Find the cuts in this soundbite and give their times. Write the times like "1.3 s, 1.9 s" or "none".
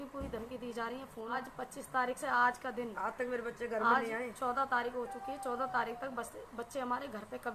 1.4 s